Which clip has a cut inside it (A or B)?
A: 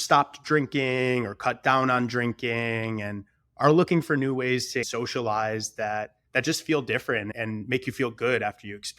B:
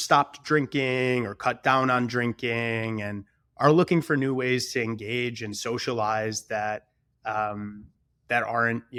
A